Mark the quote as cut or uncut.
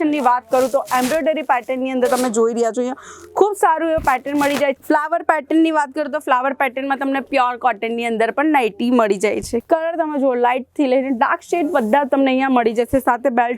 cut